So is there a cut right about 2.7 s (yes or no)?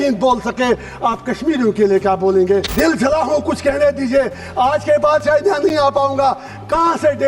yes